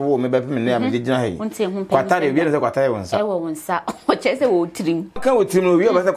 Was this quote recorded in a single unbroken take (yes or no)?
no